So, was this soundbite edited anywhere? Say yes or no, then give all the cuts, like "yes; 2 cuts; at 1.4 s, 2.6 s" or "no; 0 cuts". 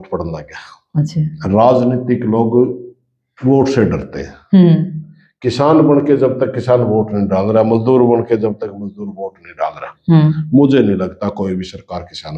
no; 0 cuts